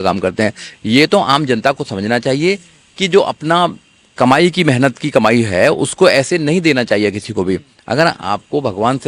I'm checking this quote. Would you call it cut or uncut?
uncut